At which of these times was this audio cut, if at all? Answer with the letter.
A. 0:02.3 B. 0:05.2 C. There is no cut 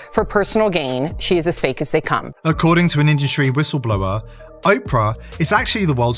A